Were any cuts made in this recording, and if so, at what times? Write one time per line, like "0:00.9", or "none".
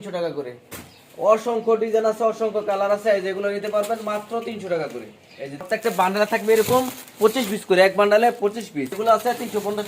0:05.6
0:08.9